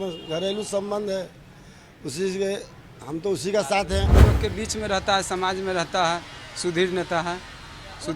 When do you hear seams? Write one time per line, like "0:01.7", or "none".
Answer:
0:04.2